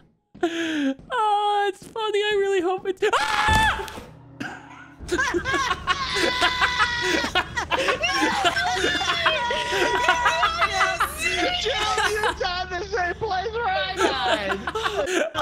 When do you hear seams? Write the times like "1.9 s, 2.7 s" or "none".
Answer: 8.5 s

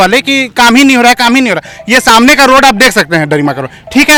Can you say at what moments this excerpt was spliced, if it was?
none

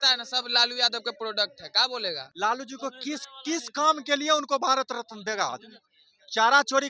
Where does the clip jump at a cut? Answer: 2.3 s

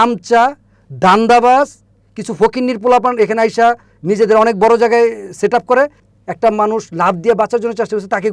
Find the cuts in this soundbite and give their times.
6.0 s

